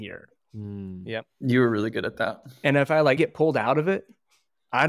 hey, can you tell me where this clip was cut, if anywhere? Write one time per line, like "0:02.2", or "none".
0:03.2